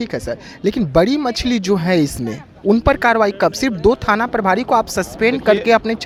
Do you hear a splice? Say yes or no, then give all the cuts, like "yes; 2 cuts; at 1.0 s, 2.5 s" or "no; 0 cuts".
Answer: no; 0 cuts